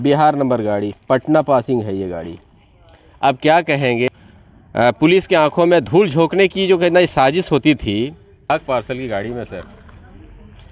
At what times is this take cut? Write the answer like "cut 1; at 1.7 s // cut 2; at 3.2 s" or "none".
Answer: cut 1; at 4.2 s // cut 2; at 8.5 s